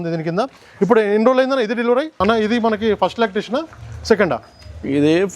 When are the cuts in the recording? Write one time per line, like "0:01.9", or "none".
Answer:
0:02.2

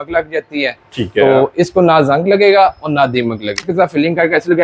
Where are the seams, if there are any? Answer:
0:03.7

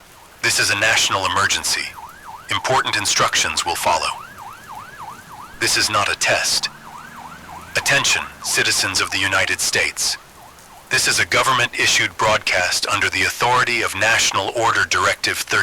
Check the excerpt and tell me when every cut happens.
none

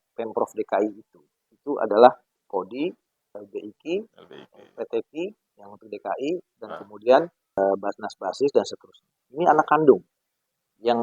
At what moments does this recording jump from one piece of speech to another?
0:02.3
0:07.6

